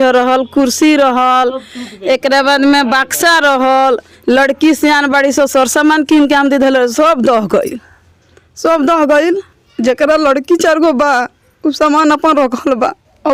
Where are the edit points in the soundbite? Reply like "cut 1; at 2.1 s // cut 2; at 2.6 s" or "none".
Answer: none